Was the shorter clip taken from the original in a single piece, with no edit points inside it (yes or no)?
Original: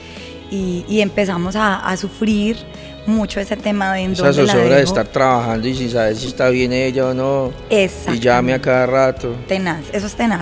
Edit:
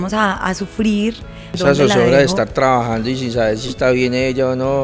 no